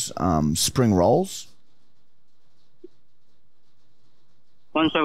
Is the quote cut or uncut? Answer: uncut